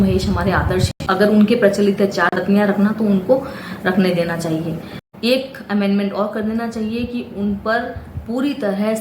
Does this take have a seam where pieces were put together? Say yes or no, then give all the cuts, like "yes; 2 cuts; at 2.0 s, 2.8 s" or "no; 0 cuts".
yes; 3 cuts; at 1.1 s, 2.3 s, 4.9 s